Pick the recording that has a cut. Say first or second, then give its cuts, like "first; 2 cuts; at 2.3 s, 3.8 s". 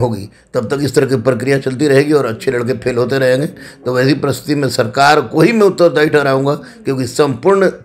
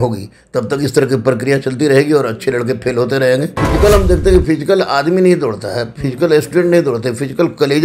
second; 1 cut; at 3.6 s